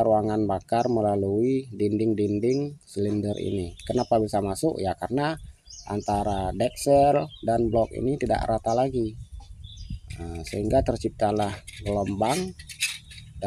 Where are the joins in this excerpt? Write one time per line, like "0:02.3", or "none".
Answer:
none